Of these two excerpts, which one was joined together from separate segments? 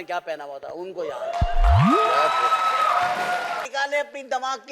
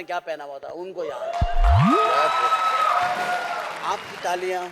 first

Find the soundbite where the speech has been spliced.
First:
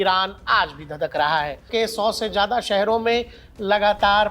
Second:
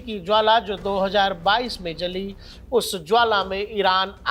first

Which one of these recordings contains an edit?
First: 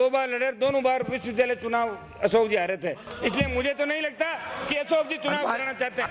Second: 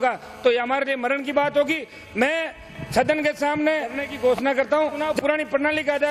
second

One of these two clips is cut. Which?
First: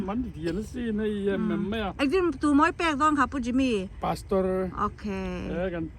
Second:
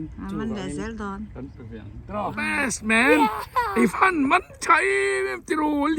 second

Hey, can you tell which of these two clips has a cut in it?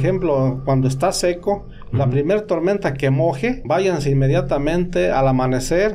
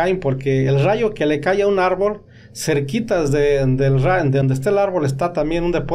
first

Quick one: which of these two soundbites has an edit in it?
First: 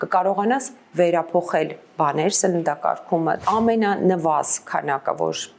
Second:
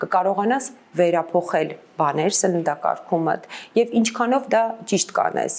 first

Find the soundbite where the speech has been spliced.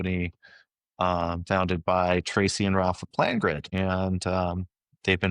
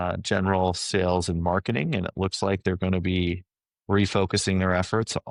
first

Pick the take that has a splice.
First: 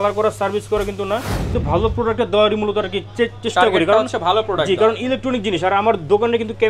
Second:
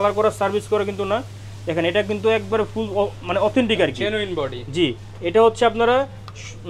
first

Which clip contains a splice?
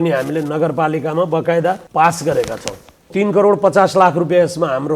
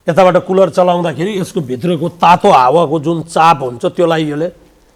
first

